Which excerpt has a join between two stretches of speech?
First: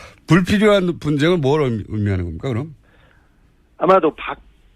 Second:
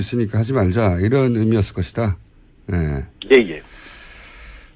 first; 1 cut; at 3.6 s

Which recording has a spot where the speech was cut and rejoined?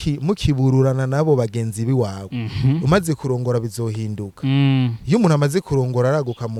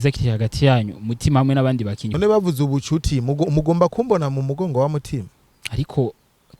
second; 1 cut; at 2.0 s

